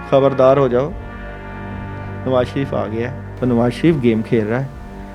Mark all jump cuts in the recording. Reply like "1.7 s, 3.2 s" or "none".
1.0 s, 2.2 s, 3.2 s